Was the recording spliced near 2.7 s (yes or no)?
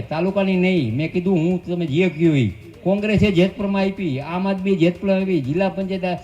yes